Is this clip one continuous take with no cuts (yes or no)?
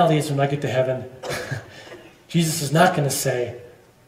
yes